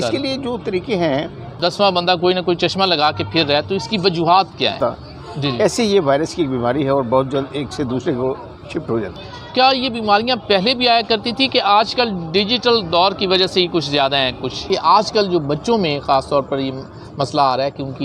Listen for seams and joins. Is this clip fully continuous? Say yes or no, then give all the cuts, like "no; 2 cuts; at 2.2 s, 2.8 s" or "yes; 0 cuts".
no; 4 cuts; at 1.5 s, 4.8 s, 9.2 s, 14.6 s